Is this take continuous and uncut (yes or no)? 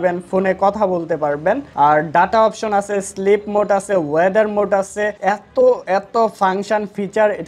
yes